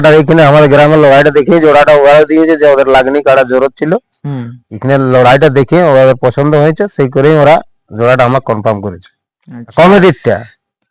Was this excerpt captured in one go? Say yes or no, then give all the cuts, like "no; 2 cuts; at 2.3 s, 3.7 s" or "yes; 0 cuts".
no; 1 cut; at 9.7 s